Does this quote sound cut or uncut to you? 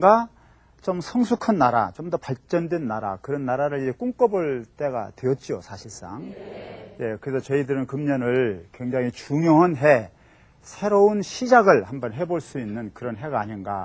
uncut